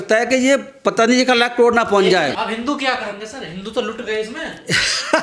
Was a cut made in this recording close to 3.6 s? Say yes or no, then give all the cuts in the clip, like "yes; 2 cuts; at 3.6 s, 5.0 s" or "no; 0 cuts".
no; 1 cut; at 2.4 s